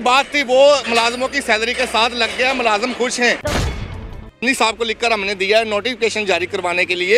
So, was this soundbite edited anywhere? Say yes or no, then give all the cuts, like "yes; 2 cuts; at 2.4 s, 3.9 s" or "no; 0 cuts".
yes; 1 cut; at 3.8 s